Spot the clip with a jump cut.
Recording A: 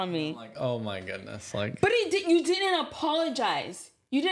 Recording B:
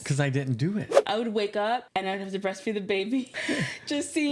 B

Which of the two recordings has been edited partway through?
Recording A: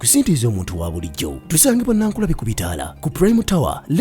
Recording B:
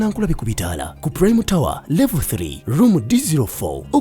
A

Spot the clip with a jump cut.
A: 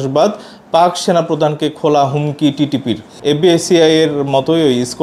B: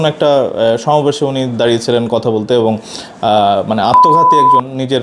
A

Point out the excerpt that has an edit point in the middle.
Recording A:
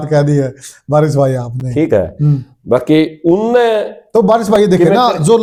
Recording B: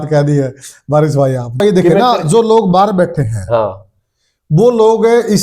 B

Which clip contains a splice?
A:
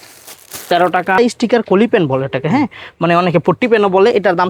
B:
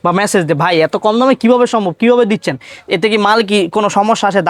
A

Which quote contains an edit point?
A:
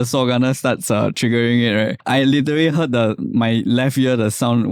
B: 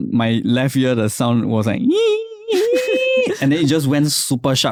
A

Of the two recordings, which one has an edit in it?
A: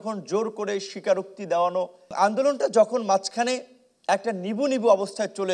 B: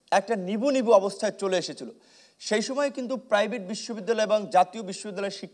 A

